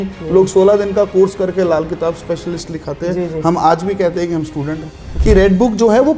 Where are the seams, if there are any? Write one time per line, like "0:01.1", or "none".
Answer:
0:05.0